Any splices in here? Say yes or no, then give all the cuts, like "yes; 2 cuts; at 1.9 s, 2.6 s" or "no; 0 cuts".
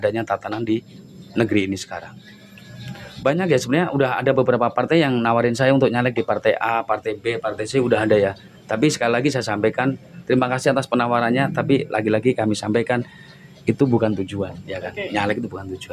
no; 0 cuts